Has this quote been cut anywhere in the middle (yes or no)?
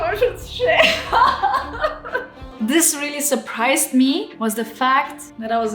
yes